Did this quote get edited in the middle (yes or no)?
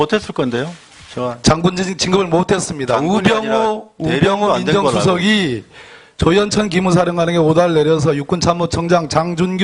yes